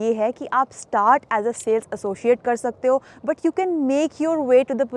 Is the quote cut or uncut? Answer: uncut